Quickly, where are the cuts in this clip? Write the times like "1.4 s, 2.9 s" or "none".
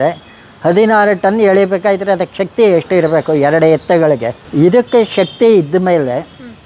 4.3 s

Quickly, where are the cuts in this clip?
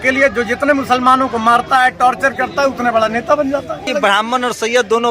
3.9 s

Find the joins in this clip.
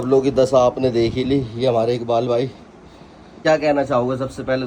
3.3 s

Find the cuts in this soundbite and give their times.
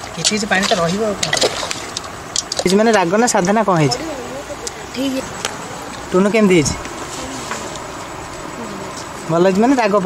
2.7 s, 5.3 s

